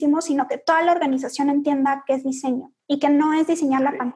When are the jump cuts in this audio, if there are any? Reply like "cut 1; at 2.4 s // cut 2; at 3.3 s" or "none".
cut 1; at 2.7 s